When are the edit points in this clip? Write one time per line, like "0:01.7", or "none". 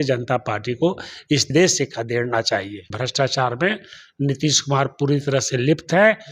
0:01.4
0:03.0